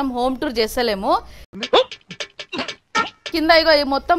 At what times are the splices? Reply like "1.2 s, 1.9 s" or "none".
1.3 s, 3.2 s